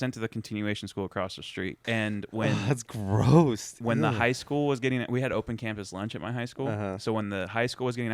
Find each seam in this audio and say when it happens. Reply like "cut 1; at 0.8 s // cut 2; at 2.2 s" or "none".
cut 1; at 1.7 s